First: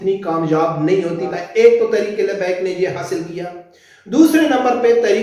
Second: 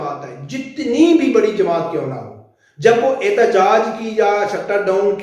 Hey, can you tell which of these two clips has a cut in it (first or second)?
first